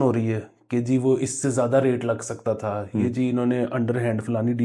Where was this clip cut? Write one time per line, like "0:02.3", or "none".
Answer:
none